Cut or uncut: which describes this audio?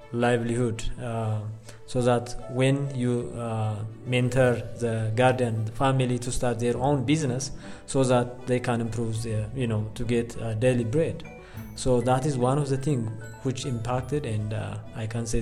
uncut